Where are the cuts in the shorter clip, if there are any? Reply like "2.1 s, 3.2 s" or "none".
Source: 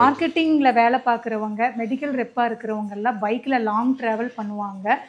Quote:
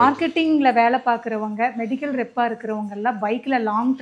none